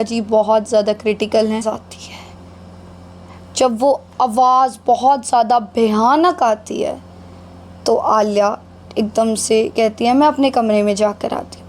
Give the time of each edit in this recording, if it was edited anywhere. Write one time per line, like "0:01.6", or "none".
0:01.6